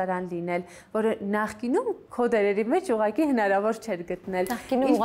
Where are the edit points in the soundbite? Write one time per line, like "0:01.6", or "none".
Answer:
0:02.0